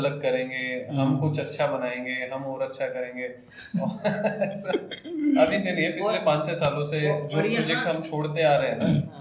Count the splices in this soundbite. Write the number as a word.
zero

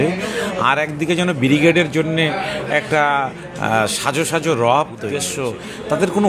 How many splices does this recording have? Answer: one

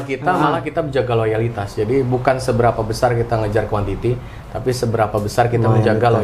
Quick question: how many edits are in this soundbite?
zero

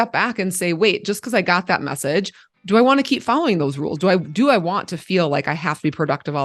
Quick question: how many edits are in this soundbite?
one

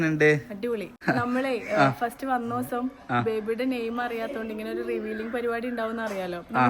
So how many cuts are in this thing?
one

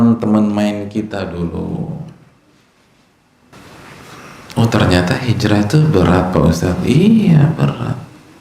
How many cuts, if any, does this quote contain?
one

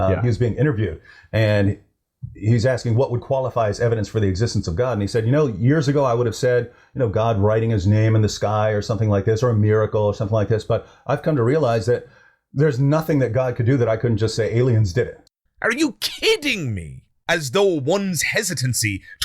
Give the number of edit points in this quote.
one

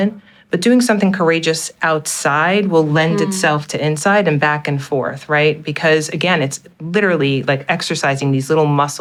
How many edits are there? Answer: zero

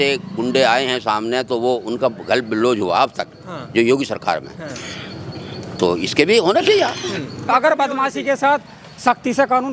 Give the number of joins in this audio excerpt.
one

